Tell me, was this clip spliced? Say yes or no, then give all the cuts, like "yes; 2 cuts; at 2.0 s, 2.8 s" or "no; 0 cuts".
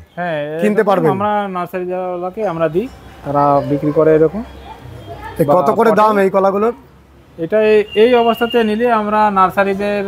no; 0 cuts